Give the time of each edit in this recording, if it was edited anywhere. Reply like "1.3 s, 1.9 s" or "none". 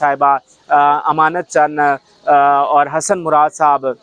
none